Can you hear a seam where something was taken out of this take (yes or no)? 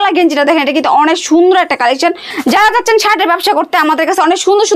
yes